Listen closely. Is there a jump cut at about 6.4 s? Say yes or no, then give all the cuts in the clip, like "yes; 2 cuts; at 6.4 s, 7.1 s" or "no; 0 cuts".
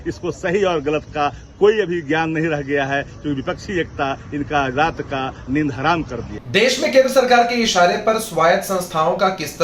no; 0 cuts